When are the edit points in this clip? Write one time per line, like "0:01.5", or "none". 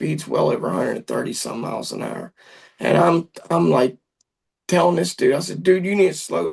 none